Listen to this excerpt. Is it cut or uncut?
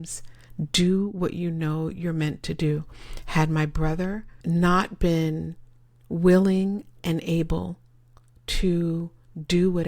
cut